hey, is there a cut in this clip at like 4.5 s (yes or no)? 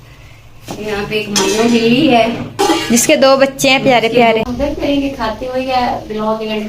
yes